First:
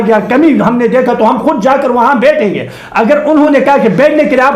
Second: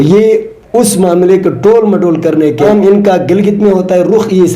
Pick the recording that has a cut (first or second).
second